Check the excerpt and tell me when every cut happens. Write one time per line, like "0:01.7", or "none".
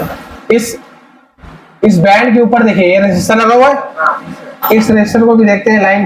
none